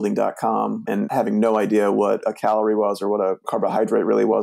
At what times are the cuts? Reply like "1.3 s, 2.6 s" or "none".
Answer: 1.1 s